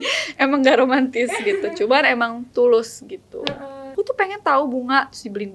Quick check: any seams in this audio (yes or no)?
yes